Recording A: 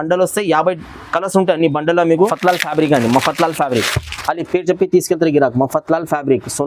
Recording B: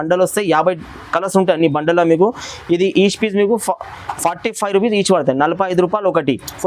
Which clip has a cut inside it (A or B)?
A